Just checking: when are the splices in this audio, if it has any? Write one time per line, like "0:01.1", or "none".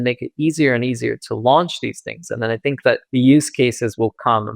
0:03.0